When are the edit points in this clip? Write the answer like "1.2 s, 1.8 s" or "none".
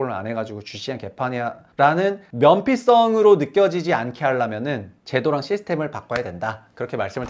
1.6 s, 2.3 s, 4.9 s